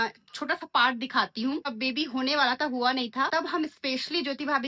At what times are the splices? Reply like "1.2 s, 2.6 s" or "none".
1.7 s, 3.3 s